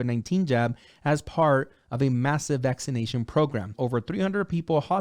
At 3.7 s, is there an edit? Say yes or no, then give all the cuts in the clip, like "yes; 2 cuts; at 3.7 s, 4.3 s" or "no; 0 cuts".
yes; 1 cut; at 3.7 s